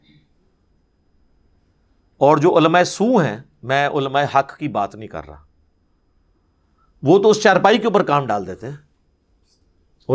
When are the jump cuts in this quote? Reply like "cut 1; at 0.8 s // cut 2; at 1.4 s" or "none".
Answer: none